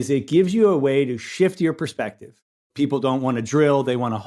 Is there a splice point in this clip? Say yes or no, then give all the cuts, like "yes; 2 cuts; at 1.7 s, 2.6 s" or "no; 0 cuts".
yes; 1 cut; at 2.7 s